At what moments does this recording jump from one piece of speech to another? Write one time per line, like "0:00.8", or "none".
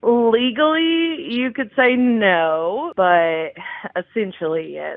0:02.9